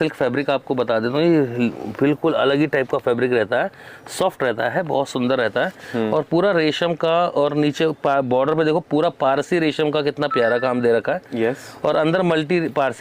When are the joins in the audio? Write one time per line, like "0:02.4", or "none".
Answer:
none